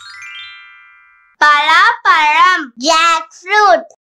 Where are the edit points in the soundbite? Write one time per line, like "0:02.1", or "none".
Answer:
0:01.2